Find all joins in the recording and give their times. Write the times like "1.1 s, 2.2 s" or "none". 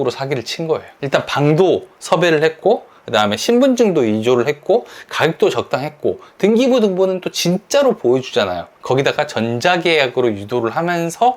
0.9 s

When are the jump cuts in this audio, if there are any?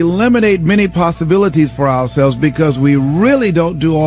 none

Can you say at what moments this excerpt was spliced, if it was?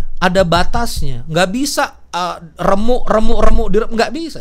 none

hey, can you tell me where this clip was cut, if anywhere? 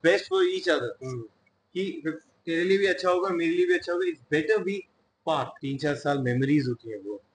5.5 s

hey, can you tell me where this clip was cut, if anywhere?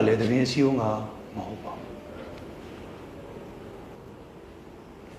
none

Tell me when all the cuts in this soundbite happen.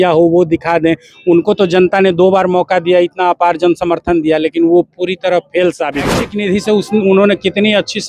6.2 s

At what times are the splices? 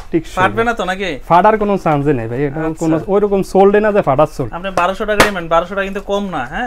none

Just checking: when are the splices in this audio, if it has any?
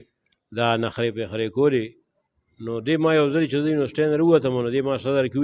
none

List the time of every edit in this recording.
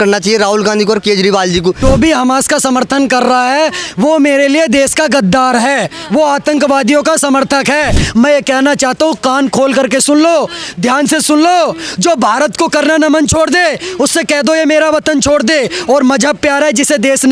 1.8 s, 8.0 s

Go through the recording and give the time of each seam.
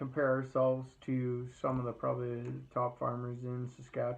none

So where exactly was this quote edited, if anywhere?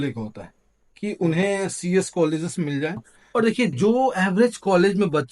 3.1 s

